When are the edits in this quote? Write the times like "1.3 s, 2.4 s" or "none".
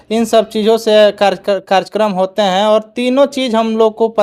none